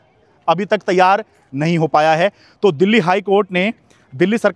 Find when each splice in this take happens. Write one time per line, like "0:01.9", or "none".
none